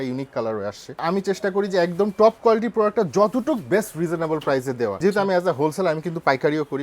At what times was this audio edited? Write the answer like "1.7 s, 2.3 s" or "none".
1.0 s, 5.0 s